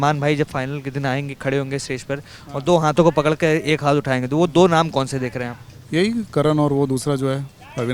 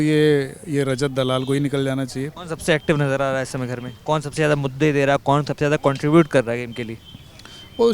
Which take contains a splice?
second; 1 cut; at 2.3 s

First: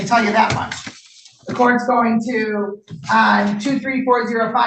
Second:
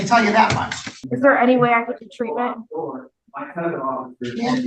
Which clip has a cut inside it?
second; 1 cut; at 1.0 s

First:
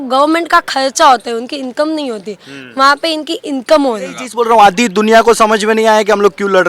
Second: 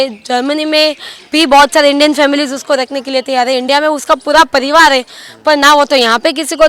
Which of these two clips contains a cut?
first; 1 cut; at 4.2 s

